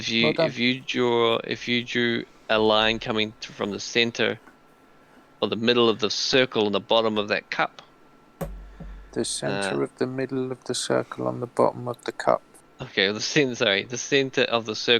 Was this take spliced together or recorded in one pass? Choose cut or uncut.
uncut